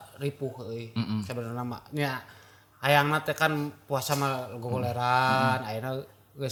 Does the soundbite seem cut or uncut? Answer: uncut